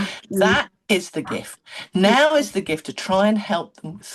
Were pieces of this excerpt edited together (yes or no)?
no